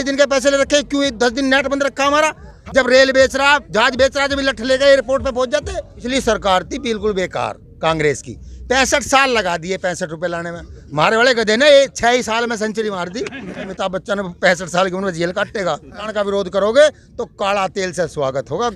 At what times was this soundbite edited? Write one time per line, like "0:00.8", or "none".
0:02.5
0:06.0
0:13.7
0:16.1